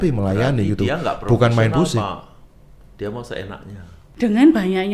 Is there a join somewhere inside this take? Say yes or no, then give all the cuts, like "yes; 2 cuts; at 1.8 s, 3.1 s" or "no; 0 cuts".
yes; 1 cut; at 4.0 s